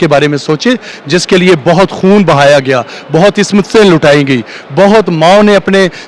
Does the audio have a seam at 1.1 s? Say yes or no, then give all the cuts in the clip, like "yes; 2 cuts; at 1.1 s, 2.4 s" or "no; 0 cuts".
no; 0 cuts